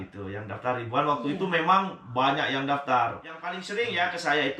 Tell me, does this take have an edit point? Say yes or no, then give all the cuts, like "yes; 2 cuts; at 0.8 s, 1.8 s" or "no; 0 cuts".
yes; 1 cut; at 3.6 s